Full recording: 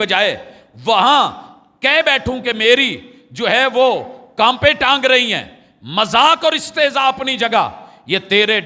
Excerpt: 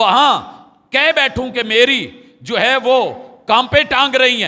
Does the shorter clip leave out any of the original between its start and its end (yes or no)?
no